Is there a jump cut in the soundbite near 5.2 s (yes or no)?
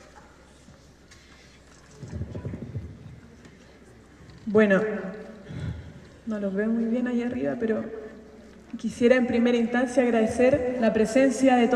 no